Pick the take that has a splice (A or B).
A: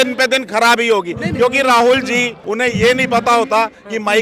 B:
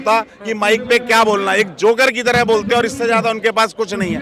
A